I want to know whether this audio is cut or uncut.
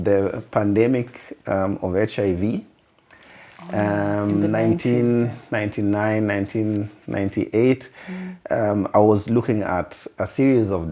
uncut